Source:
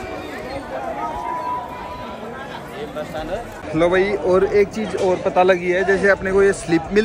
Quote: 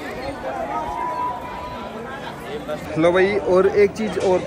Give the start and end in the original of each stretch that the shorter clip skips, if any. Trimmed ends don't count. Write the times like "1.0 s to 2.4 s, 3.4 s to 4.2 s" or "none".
3.1 s to 3.6 s